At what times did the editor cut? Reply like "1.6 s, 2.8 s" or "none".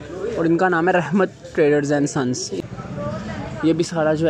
2.6 s

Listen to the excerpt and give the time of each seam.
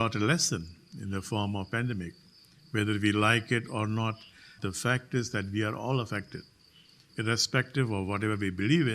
4.6 s

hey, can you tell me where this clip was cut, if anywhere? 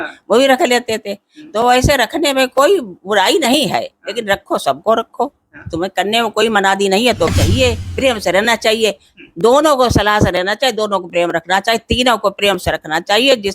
7.3 s

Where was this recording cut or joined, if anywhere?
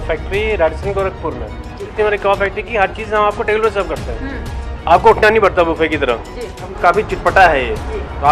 1.8 s, 6.7 s

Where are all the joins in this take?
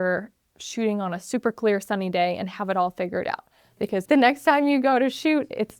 4.0 s

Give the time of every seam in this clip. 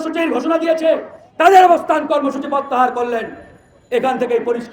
1.2 s

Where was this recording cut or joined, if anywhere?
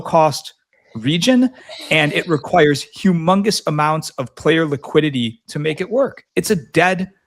6.2 s

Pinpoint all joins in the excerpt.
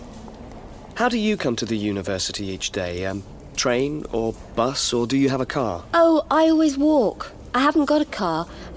0.9 s

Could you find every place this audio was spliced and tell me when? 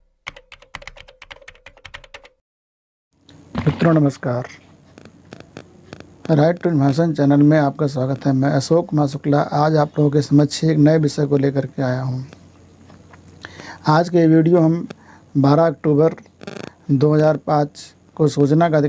3.2 s

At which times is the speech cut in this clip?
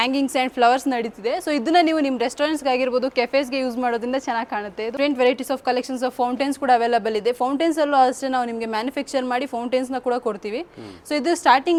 none

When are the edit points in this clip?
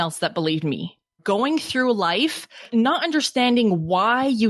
1.2 s, 2.6 s

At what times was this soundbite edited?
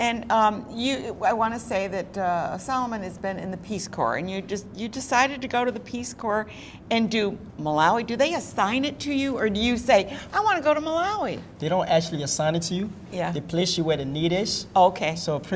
1.8 s

